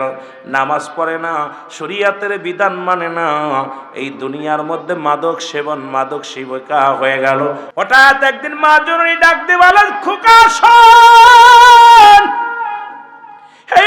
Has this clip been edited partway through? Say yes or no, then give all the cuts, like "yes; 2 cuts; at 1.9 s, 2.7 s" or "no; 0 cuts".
yes; 1 cut; at 7.8 s